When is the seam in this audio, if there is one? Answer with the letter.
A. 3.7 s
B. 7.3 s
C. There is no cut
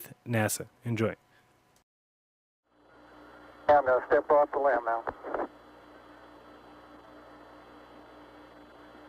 A